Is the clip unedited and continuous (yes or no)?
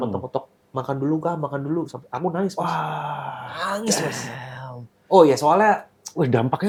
yes